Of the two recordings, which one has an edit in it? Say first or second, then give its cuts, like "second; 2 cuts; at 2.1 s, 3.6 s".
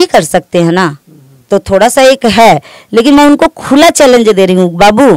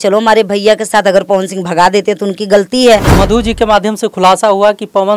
second; 1 cut; at 3.1 s